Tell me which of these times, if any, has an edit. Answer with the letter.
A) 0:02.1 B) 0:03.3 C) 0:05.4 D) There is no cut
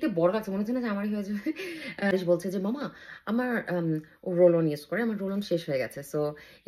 A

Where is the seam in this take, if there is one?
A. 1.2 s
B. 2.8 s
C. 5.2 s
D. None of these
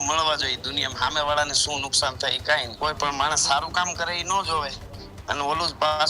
B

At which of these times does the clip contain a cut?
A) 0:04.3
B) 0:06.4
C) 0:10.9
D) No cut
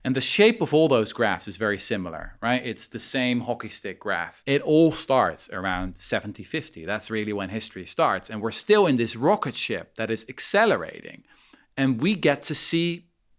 A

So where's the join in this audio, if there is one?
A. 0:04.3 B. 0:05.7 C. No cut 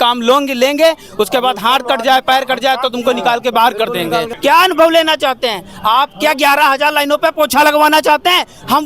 A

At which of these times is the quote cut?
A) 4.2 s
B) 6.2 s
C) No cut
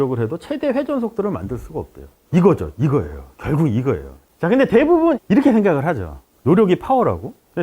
A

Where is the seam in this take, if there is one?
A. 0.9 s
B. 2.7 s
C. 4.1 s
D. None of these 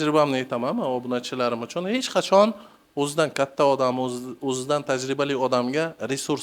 D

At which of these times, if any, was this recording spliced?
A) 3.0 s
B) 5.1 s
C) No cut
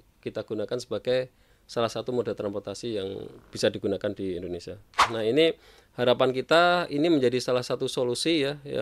B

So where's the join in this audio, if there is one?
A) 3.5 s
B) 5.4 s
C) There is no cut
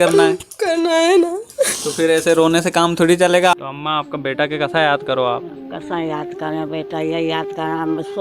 A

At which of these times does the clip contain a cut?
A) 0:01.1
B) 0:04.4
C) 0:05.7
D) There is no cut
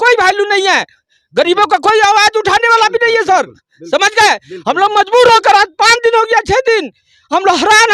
D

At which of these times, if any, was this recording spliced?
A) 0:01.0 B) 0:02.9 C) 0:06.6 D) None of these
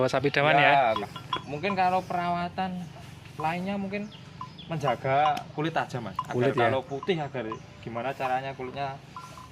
A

